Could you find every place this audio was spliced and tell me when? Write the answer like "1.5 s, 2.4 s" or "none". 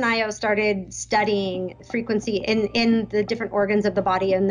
none